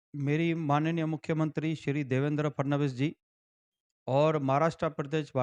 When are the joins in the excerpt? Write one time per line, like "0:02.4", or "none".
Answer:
none